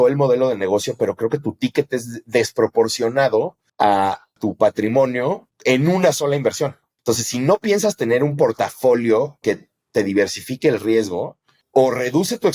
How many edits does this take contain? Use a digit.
2